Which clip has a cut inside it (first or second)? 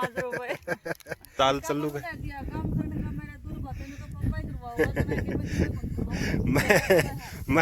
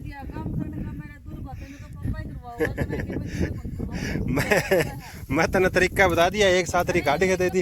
first